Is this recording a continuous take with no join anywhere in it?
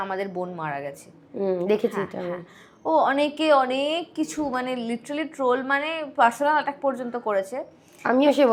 yes; 0 cuts

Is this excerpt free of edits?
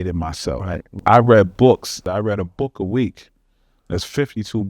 no; 2 cuts; at 0.9 s, 1.9 s

